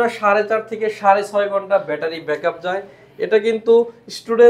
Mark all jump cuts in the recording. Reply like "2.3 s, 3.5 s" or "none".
none